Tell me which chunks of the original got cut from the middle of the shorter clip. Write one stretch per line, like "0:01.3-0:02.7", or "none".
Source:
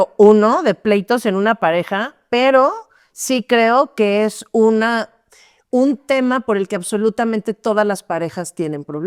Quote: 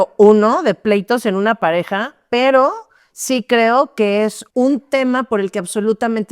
0:04.4-0:05.6